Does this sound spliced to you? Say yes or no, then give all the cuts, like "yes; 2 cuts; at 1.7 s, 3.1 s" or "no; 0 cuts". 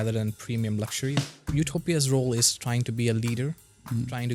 yes; 1 cut; at 1.4 s